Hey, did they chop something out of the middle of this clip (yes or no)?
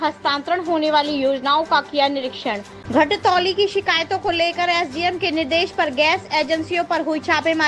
yes